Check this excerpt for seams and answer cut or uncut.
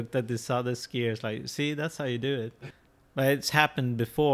cut